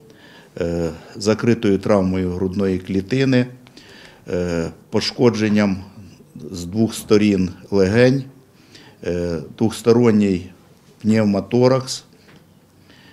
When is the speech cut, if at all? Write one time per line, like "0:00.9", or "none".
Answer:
none